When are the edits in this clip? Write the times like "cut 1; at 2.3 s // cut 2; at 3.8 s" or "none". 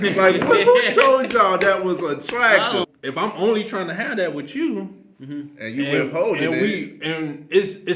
cut 1; at 2.9 s